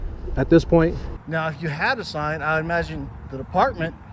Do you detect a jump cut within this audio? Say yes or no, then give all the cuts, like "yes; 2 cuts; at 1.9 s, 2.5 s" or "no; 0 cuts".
yes; 1 cut; at 1.0 s